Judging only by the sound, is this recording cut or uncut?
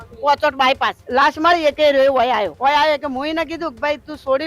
cut